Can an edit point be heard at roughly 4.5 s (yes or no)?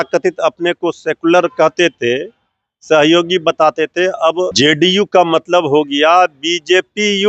yes